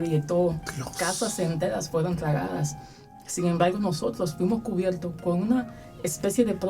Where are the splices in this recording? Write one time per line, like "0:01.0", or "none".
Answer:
none

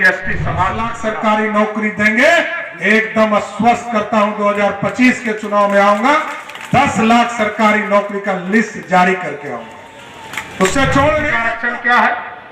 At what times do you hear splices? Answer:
0:01.0
0:11.5

